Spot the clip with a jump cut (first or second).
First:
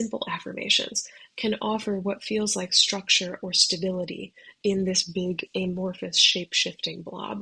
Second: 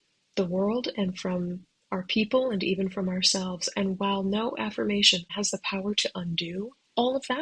second